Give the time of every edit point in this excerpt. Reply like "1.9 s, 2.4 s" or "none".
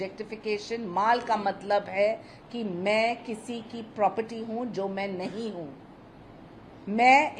none